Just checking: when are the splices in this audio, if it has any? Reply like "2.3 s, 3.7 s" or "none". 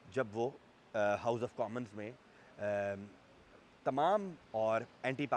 4.4 s